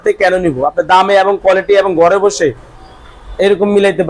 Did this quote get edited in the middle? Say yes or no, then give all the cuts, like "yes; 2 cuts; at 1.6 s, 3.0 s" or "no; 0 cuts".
no; 0 cuts